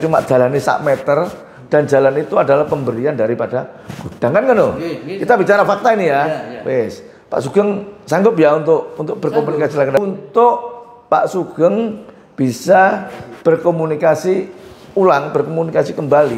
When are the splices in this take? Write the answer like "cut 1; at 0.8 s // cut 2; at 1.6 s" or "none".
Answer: cut 1; at 10.0 s